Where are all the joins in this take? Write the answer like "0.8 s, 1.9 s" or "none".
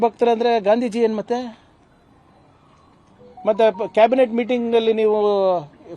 none